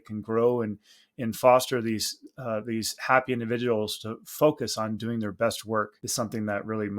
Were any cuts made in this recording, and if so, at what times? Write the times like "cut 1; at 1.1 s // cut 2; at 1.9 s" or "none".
cut 1; at 6.0 s